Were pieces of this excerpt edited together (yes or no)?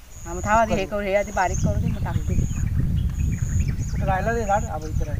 no